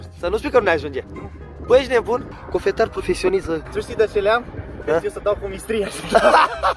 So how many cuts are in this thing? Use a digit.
2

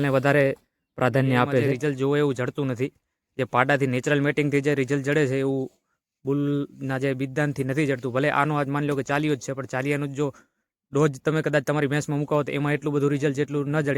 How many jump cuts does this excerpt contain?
1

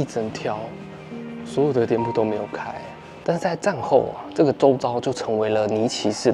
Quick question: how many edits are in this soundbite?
1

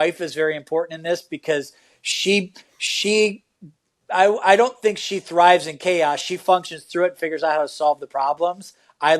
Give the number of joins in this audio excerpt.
0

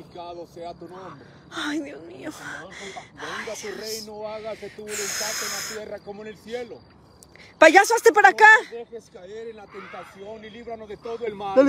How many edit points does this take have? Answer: 0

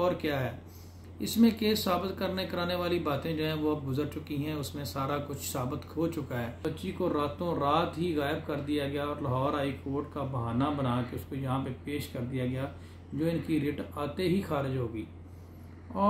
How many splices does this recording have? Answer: 1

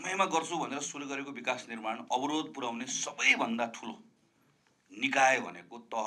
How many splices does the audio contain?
0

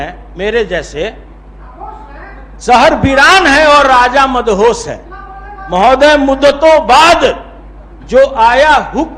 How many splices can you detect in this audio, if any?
0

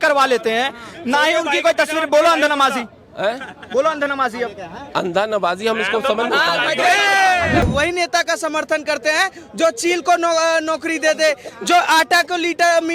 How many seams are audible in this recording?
1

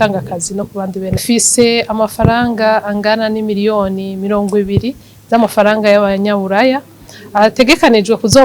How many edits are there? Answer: 1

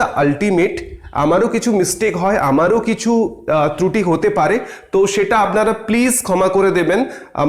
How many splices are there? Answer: 0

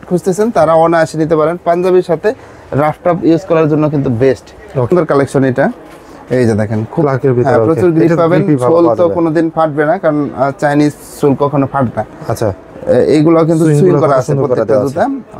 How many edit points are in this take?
1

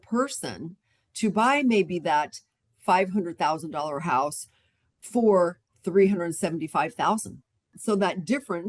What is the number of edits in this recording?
1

